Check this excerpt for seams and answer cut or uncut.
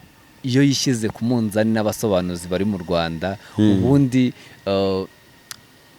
uncut